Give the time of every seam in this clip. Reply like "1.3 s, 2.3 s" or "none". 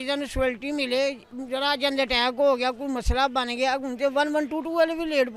none